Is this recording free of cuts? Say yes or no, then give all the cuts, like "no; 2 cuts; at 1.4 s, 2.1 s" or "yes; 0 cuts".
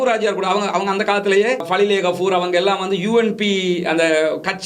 no; 1 cut; at 1.7 s